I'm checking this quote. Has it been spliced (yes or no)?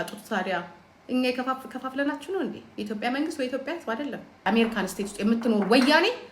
yes